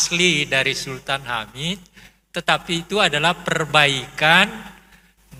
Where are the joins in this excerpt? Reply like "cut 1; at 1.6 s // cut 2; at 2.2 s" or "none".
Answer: none